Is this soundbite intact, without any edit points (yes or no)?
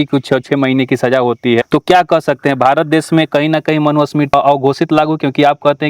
no